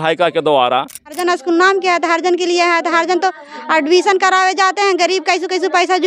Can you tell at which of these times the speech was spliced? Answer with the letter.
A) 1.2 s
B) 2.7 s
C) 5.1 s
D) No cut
A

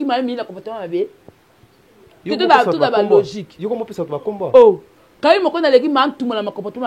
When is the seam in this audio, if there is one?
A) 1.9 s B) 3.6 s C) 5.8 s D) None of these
D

